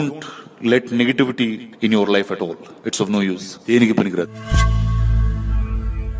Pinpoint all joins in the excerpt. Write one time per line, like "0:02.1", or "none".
0:04.3